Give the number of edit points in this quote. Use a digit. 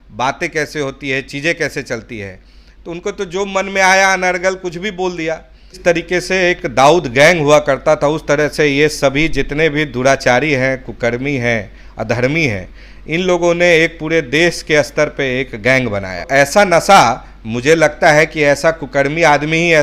2